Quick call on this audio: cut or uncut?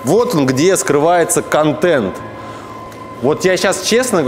uncut